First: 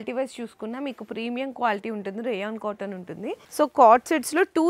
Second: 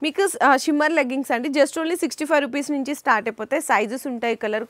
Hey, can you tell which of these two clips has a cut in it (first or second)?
first